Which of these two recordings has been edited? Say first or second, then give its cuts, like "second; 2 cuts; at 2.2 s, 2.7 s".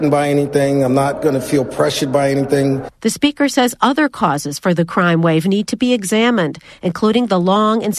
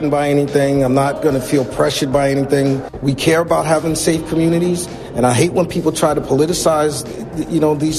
second; 1 cut; at 2.9 s